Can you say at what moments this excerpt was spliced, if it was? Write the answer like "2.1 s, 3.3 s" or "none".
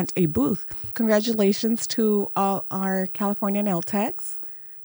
0.9 s

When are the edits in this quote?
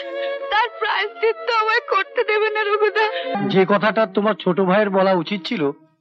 3.3 s

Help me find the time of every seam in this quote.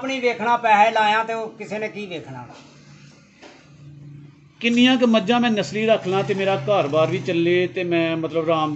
none

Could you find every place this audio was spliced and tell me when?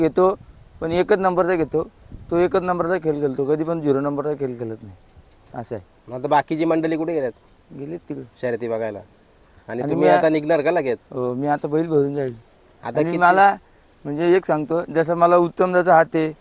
none

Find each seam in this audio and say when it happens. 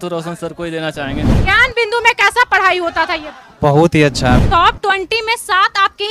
1.3 s, 4.4 s

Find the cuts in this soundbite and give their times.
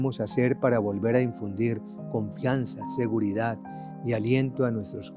none

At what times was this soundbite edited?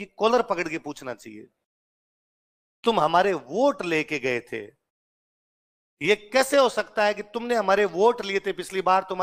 none

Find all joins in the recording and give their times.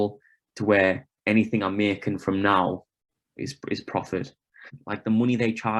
4.7 s

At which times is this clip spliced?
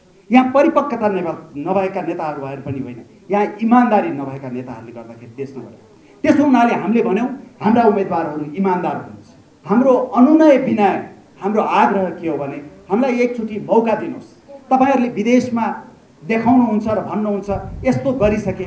9.5 s

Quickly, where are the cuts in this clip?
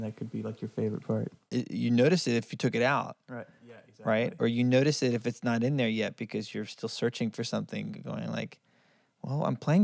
1.4 s

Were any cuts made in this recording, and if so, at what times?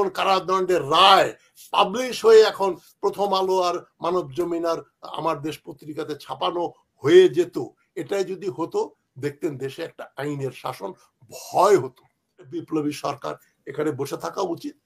12.6 s

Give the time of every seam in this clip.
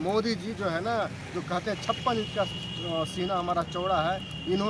none

